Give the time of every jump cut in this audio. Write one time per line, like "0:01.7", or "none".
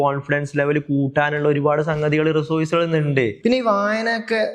0:03.4